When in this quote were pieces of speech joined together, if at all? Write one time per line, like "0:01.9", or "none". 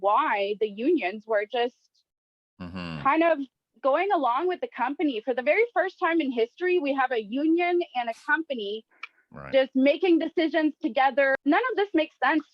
0:11.4